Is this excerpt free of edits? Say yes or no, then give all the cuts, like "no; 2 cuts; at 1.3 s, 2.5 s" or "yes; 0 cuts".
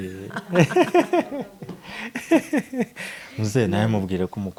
yes; 0 cuts